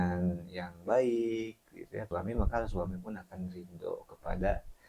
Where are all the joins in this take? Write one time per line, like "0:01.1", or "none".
0:02.1